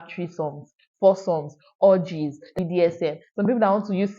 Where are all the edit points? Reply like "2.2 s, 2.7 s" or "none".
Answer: 2.5 s